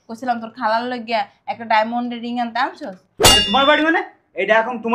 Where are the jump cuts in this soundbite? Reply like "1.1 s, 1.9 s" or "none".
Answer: 3.2 s